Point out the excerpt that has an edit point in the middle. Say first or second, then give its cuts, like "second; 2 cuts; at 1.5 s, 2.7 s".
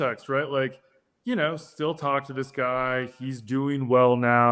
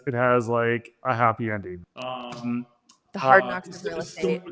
second; 1 cut; at 1.7 s